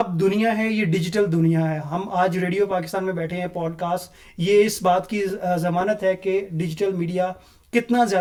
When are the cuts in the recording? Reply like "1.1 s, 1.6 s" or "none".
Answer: none